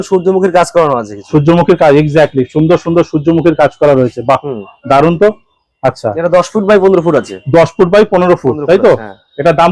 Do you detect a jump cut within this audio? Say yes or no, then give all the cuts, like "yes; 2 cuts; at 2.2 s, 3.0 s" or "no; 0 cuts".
no; 0 cuts